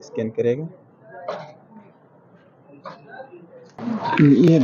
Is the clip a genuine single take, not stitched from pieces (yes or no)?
yes